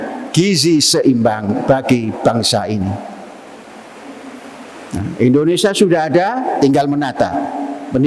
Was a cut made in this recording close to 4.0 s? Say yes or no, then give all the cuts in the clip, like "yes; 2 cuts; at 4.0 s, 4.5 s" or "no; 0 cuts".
yes; 1 cut; at 4.0 s